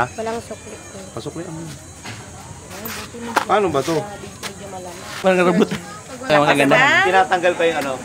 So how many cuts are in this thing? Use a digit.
2